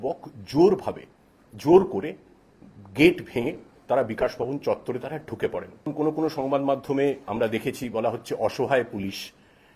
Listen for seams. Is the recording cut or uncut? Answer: cut